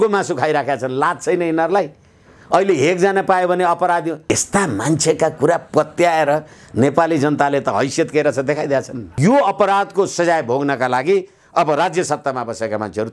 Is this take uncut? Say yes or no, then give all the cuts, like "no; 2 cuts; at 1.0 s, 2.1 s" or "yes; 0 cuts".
no; 2 cuts; at 4.2 s, 9.1 s